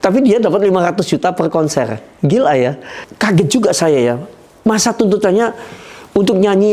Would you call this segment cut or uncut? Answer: cut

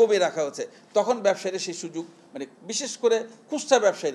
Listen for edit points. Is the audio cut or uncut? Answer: uncut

